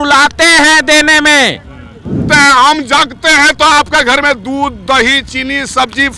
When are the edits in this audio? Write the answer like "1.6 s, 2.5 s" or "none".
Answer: 2.2 s